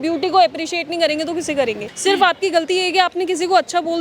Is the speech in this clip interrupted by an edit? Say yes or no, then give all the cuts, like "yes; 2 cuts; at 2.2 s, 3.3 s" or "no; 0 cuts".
yes; 1 cut; at 1.9 s